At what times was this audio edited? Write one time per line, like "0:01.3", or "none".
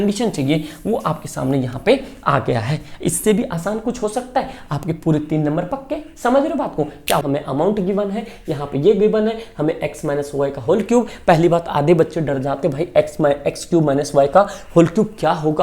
0:07.2